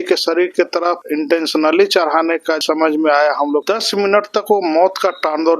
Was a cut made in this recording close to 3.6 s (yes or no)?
yes